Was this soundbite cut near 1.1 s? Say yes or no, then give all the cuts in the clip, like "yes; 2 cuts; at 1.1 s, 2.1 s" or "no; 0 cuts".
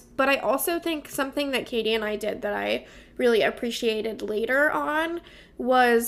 no; 0 cuts